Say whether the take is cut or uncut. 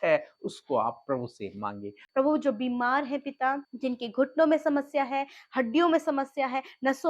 cut